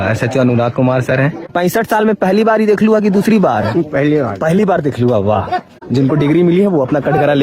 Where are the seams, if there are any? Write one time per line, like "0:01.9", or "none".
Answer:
0:01.5
0:05.8